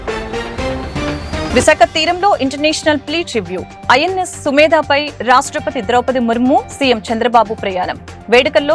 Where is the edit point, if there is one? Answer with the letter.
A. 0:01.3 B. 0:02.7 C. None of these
C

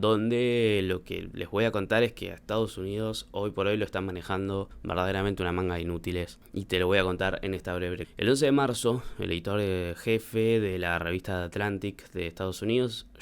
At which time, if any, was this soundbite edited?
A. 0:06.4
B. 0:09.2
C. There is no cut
C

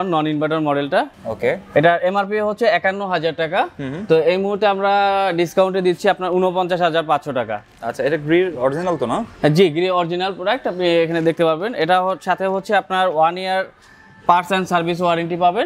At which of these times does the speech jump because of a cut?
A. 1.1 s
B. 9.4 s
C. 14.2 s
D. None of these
A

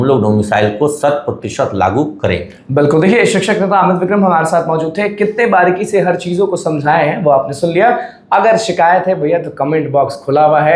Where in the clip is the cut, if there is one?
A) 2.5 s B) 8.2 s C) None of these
C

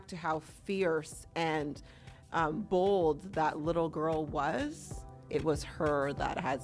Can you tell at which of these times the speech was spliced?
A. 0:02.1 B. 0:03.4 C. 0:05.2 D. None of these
C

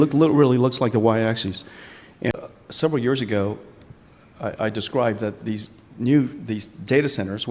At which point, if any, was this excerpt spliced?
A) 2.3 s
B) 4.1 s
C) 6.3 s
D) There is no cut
A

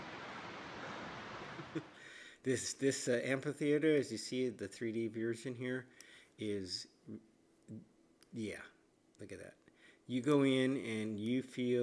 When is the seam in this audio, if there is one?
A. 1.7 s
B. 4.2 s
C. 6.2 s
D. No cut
A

